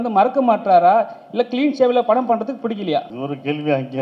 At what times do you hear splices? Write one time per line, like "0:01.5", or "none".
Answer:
0:03.1